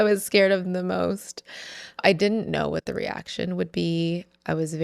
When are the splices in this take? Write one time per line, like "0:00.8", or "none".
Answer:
0:02.0